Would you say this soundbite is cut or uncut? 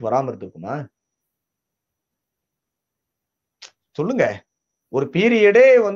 uncut